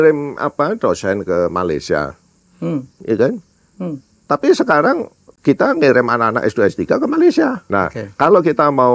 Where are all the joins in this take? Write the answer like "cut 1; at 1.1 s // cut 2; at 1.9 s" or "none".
cut 1; at 7.6 s